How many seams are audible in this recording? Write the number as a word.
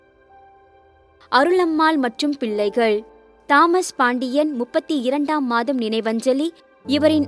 one